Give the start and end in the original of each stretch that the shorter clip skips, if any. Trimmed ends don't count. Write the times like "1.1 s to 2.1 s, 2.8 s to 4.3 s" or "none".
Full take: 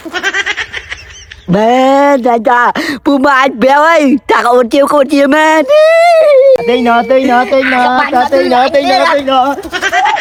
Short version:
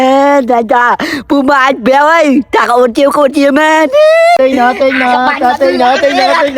6.1 s to 7.1 s

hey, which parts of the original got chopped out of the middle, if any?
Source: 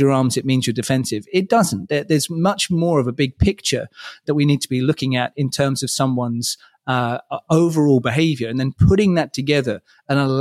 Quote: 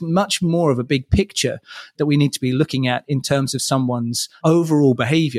6.6 s to 7.3 s

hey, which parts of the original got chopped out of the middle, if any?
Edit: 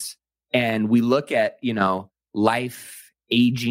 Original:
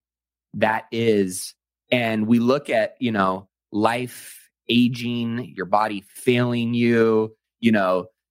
none

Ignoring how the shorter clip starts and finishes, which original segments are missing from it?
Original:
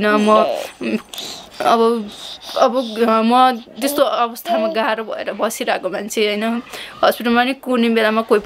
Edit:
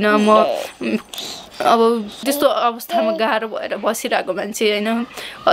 2.2 s to 3.7 s

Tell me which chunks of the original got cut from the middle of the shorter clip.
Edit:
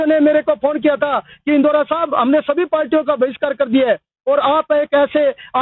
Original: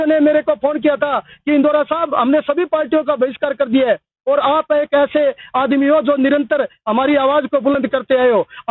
none

